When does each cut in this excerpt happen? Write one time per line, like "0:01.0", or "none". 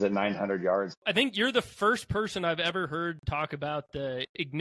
0:00.9